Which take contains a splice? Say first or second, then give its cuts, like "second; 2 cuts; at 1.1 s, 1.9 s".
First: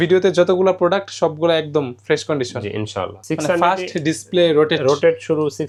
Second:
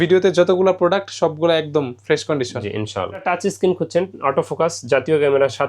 second; 1 cut; at 3.2 s